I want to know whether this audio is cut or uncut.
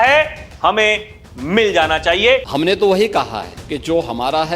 cut